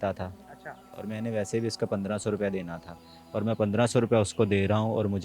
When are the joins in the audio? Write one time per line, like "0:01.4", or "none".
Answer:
0:00.9

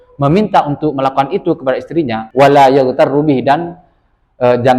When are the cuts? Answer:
0:02.2

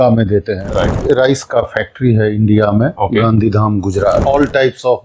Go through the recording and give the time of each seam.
0:01.0
0:02.9
0:04.2

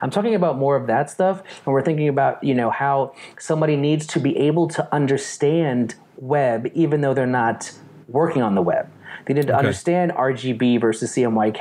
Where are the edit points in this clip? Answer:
none

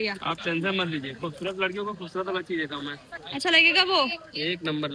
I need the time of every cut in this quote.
0:03.0

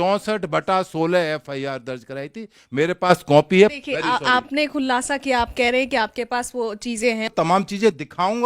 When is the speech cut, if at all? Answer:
0:03.7
0:07.3

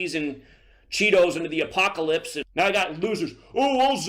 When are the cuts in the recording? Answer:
0:02.4

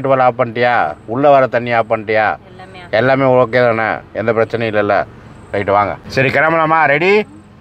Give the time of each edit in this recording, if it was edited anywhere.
0:06.0

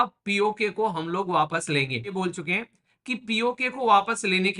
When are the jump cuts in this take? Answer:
0:02.1

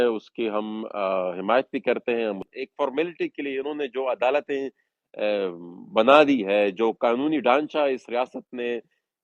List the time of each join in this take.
0:02.5

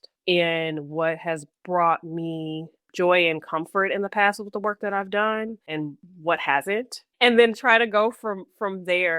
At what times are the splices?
0:06.0
0:07.0

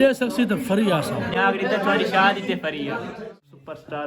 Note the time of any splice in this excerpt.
0:01.3
0:03.1

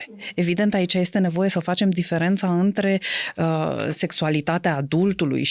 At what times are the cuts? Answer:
none

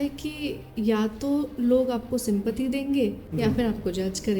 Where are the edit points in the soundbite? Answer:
0:03.2

